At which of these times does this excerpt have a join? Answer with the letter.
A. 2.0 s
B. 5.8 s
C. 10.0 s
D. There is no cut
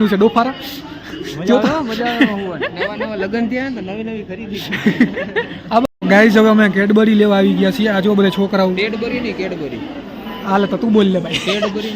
B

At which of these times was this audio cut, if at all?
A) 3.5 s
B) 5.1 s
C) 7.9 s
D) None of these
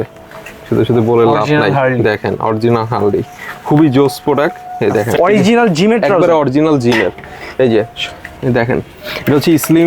B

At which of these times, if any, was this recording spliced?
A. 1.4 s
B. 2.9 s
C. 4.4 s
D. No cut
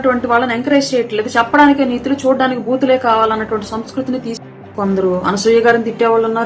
C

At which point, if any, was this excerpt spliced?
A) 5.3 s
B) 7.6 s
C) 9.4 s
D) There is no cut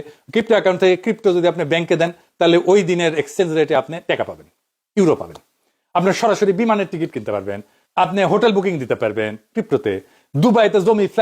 D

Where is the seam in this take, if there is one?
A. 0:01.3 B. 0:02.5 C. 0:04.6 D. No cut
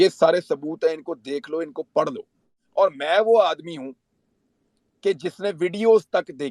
B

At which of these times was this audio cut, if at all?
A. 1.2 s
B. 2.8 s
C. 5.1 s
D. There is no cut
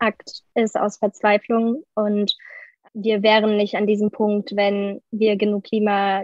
B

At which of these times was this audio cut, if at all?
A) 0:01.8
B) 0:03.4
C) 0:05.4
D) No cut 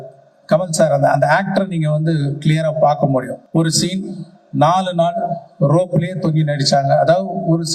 B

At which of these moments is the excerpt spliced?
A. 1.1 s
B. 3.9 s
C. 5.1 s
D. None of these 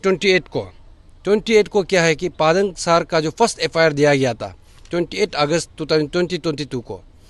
D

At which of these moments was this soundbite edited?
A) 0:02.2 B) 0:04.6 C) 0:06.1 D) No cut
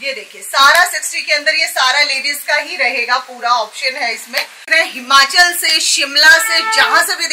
B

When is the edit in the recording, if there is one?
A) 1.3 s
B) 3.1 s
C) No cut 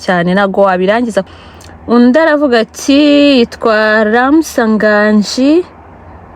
A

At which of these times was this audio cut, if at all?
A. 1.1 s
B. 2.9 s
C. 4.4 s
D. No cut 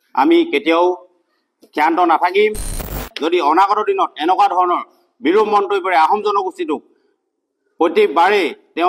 B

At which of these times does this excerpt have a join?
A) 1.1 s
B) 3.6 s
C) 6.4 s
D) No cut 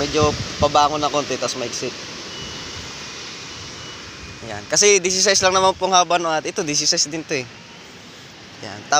D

